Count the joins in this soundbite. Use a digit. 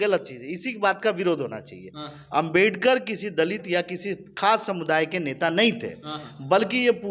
0